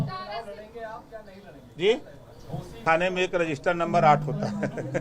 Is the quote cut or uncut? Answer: cut